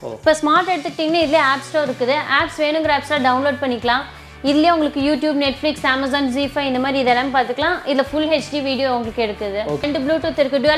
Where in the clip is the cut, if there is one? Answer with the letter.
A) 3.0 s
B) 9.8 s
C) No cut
B